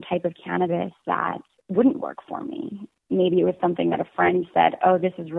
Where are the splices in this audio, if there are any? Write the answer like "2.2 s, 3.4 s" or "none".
1.5 s, 3.0 s